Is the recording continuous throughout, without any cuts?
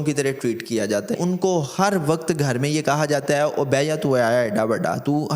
no; 1 cut; at 1.1 s

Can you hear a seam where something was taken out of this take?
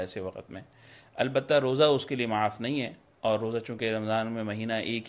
no; 0 cuts

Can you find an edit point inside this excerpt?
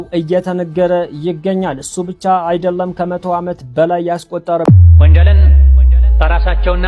yes; 1 cut; at 4.6 s

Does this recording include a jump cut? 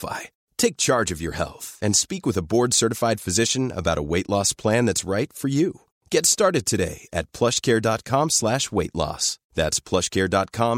no; 0 cuts

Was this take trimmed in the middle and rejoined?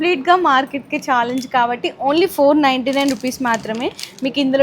no; 0 cuts

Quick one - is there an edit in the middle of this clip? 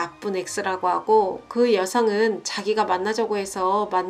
no; 0 cuts

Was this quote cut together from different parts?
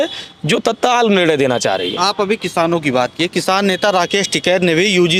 no; 0 cuts

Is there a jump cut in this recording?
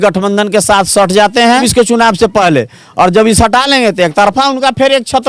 yes; 1 cut; at 1.7 s

